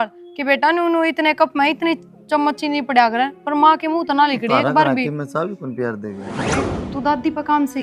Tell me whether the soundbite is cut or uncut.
cut